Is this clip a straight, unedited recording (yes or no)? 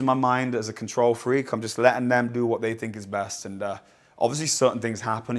yes